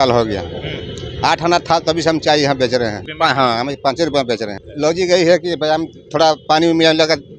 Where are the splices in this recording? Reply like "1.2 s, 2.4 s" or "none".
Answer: 3.0 s, 4.6 s